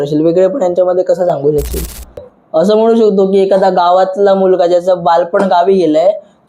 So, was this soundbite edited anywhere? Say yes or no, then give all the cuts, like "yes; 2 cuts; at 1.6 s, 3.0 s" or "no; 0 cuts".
yes; 1 cut; at 2.2 s